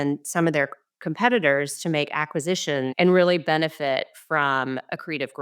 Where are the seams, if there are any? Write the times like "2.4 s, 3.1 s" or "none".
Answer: 2.9 s

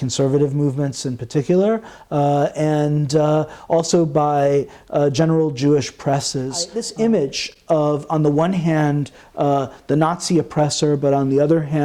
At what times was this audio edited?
6.8 s

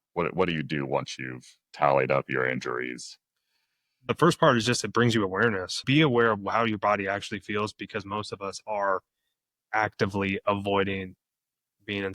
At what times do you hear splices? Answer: 4.1 s, 5.8 s

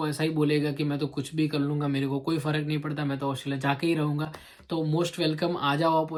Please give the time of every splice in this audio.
none

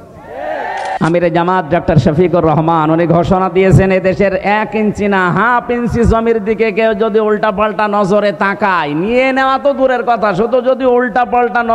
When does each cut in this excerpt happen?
1.0 s

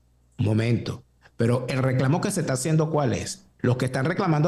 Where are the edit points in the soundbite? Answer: none

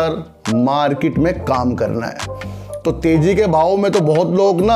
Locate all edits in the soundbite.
none

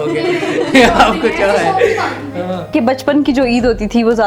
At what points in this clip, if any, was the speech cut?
2.7 s

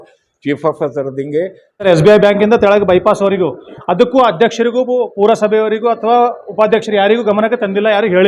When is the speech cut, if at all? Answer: 1.8 s

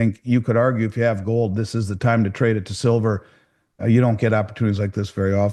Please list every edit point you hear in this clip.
none

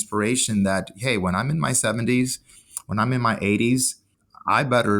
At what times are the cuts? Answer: 4.0 s

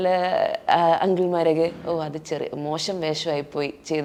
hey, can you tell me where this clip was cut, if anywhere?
none

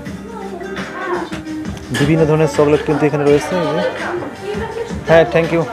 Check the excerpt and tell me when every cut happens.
1.2 s

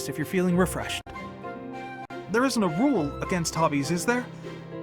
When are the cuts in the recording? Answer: 0.9 s, 2.2 s

